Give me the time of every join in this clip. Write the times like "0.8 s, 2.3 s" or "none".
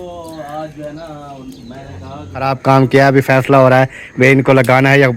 2.5 s